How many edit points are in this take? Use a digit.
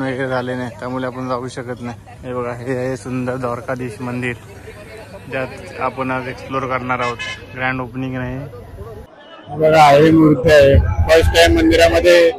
1